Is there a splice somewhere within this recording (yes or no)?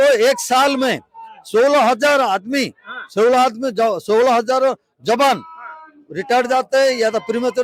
no